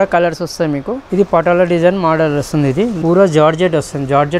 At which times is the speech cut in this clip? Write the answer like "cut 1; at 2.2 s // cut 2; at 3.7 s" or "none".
cut 1; at 1.0 s // cut 2; at 3.0 s